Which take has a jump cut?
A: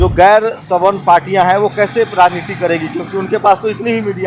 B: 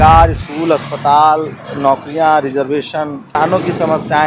B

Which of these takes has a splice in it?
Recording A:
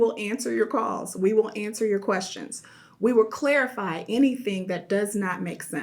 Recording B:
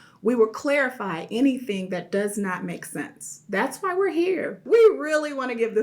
B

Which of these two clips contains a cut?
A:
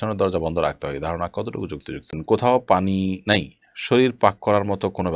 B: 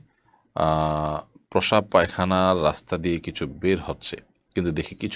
A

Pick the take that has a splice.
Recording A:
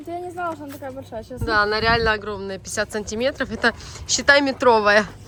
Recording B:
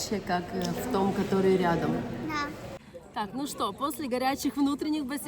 B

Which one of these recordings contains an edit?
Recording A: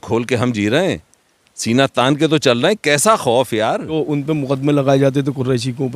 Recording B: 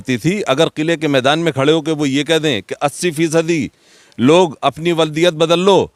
A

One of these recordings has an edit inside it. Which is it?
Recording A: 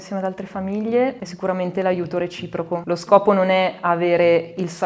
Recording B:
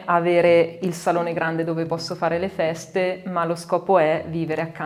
A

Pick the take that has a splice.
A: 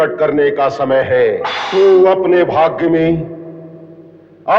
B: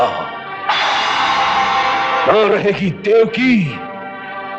A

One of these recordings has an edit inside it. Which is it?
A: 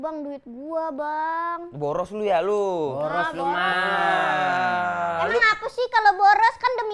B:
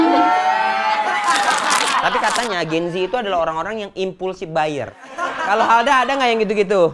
B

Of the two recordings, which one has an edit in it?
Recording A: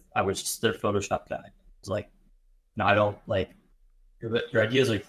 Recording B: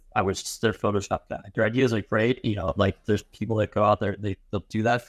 B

